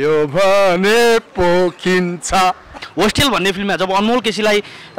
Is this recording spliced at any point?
yes; 1 cut; at 2.7 s

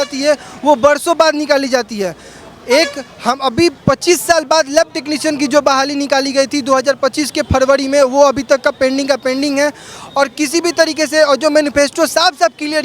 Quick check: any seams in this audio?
no; 0 cuts

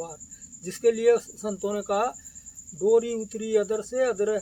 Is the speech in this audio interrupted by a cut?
no; 0 cuts

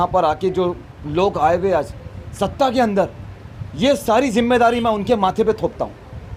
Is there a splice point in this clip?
no; 0 cuts

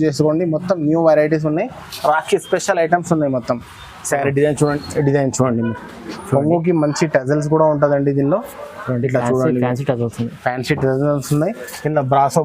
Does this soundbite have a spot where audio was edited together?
yes; 1 cut; at 4.6 s

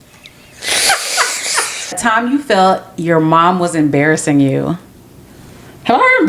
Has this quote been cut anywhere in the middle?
yes; 1 cut; at 2.0 s

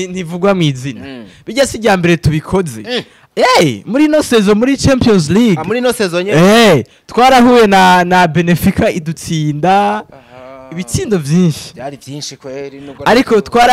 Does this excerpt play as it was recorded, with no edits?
yes; 0 cuts

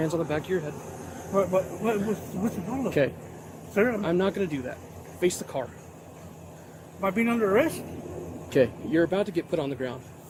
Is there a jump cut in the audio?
no; 0 cuts

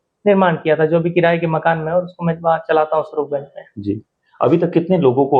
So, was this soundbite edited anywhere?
no; 0 cuts

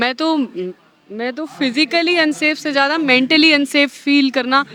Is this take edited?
no; 0 cuts

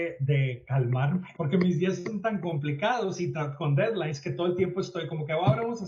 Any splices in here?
yes; 1 cut; at 1.3 s

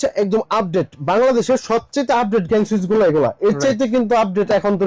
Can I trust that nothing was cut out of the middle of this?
yes; 0 cuts

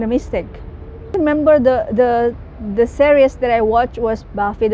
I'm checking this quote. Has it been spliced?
yes; 1 cut; at 1.1 s

